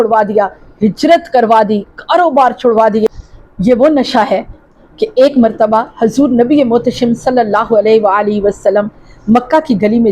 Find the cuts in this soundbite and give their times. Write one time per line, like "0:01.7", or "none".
0:03.1